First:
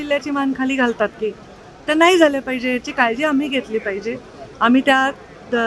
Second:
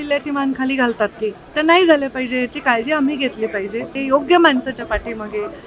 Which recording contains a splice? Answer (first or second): second